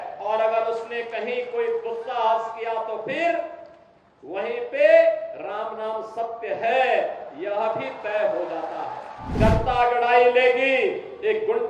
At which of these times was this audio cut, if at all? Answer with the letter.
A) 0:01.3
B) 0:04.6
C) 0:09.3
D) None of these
C